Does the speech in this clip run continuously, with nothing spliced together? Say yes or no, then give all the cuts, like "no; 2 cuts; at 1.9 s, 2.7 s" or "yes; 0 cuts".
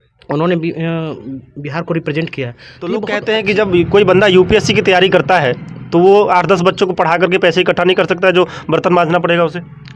no; 1 cut; at 3.0 s